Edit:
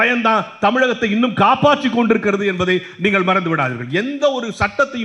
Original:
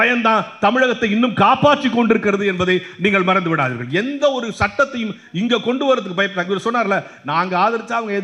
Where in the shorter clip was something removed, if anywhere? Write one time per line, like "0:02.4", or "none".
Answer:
none

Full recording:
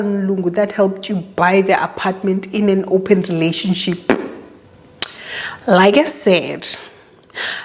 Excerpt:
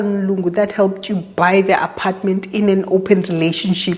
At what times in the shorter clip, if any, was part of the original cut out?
none

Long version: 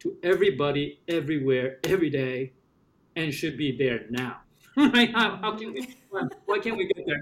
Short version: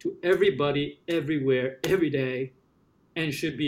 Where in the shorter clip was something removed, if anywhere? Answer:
none

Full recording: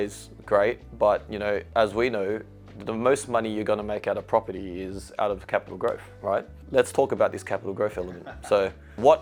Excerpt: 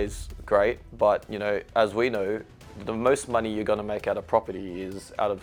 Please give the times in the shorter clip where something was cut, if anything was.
none

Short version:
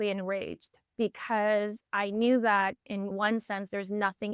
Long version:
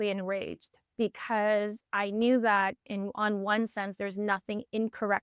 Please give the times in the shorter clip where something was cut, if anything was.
0:03.1

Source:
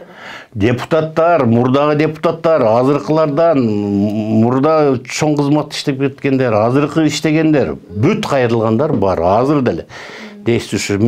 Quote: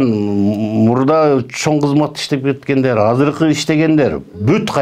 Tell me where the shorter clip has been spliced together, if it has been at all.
none

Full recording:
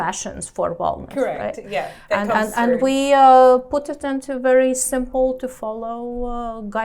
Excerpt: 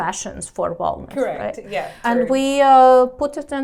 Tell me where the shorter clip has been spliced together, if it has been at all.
0:02.0

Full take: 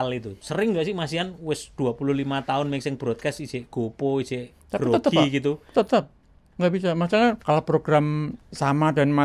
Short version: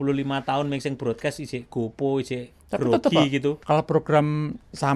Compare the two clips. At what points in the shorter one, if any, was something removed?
0:03.6

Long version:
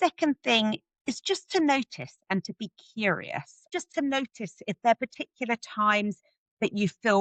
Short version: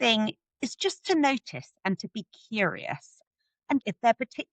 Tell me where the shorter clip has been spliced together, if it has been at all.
0:03.5

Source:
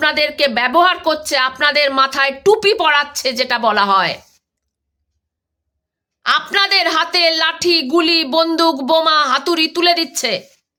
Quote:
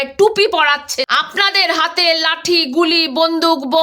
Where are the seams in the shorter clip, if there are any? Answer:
0:01.1

